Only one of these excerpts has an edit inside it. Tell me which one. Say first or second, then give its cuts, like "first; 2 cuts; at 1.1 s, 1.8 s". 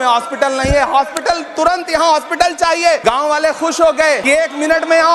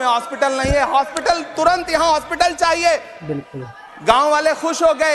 first; 2 cuts; at 3.0 s, 4.3 s